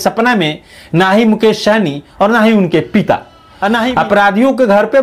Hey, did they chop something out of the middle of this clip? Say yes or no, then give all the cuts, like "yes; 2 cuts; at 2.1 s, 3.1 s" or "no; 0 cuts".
yes; 1 cut; at 3.9 s